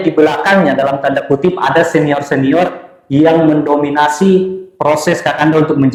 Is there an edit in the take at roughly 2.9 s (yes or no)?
no